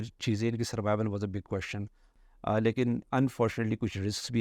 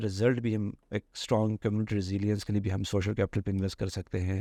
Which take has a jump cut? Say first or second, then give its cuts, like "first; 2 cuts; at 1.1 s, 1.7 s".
first; 1 cut; at 2.1 s